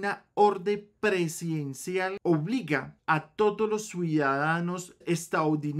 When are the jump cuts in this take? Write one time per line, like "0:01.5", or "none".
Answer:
0:02.2